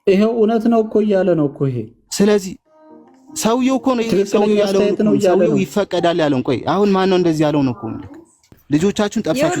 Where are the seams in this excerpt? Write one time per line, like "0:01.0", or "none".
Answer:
0:08.6